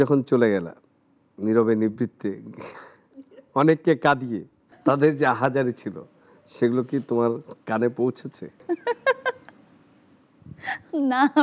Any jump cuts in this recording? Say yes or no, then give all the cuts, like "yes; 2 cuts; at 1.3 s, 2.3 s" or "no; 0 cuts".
yes; 2 cuts; at 4.8 s, 8.6 s